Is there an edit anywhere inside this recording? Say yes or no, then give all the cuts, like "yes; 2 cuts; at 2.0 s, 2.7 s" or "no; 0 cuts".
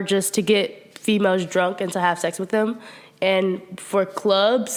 no; 0 cuts